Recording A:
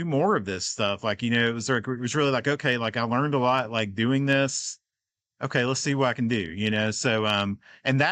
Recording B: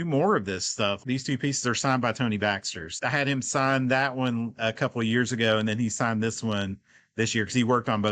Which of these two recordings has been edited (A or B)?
B